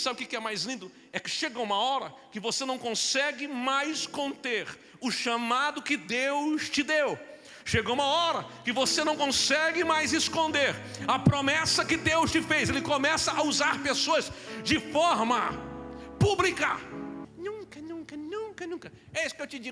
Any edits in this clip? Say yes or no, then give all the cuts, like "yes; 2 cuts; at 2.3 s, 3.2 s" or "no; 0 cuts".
yes; 1 cut; at 17.2 s